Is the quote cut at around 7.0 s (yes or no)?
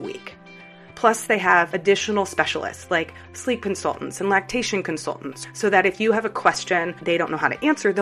yes